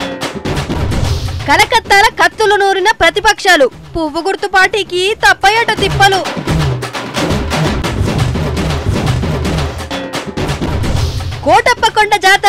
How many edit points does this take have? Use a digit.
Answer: 1